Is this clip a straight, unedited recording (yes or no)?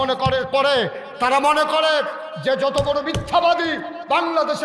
yes